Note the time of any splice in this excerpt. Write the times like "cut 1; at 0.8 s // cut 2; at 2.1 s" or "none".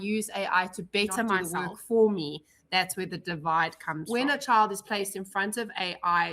cut 1; at 1.5 s // cut 2; at 4.0 s

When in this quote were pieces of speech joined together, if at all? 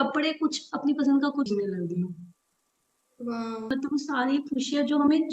cut 1; at 1.5 s // cut 2; at 3.7 s

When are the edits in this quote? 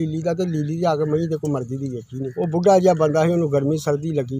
cut 1; at 2.2 s

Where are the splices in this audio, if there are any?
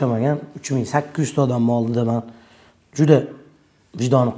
none

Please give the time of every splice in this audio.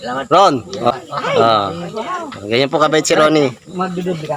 cut 1; at 0.9 s

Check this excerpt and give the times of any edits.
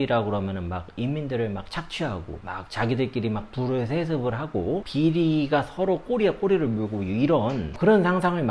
none

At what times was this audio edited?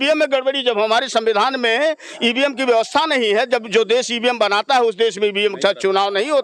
none

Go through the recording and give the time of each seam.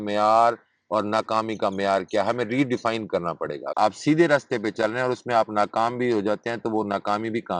cut 1; at 3.7 s

